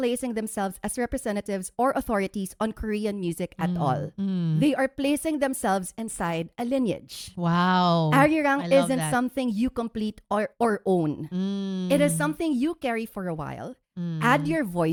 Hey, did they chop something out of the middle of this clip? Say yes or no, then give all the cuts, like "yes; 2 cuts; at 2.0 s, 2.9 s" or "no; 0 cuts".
no; 0 cuts